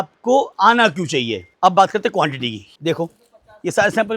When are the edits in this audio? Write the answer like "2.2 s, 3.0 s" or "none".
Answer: 1.4 s, 2.7 s